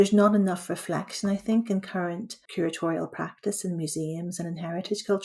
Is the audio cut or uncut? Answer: cut